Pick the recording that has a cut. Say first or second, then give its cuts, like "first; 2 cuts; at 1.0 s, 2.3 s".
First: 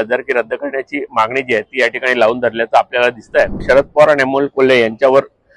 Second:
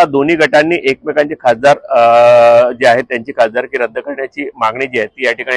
first; 1 cut; at 3.6 s